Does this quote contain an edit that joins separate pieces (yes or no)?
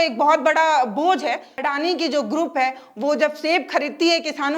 yes